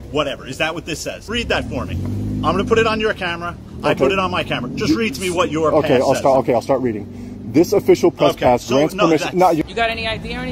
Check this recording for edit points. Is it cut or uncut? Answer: cut